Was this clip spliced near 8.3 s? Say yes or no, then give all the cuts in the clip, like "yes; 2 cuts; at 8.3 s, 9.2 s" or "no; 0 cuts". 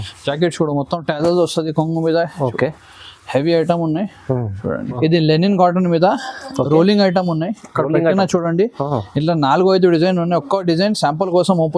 no; 1 cut; at 4.9 s